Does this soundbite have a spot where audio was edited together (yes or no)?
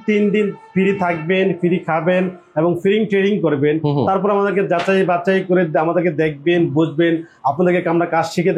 no